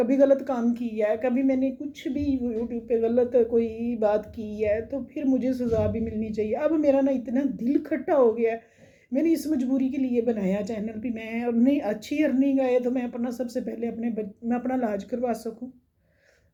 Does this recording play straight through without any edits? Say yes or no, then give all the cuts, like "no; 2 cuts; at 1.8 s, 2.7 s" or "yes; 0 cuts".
yes; 0 cuts